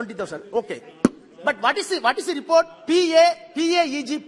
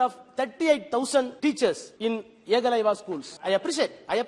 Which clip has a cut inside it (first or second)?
second